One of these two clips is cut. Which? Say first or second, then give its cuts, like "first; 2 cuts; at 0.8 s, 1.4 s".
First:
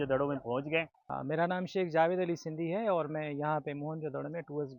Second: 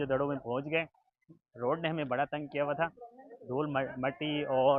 first; 1 cut; at 1.0 s